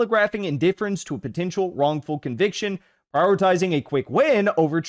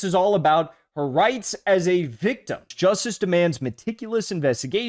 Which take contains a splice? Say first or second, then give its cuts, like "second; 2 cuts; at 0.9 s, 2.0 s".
second; 1 cut; at 2.7 s